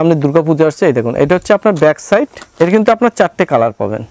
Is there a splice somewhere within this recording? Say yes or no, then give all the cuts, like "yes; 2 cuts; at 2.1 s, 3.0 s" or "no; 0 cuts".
yes; 1 cut; at 2.4 s